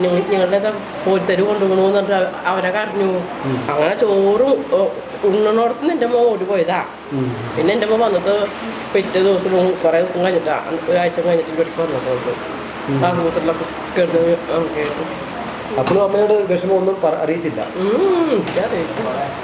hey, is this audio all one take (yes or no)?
yes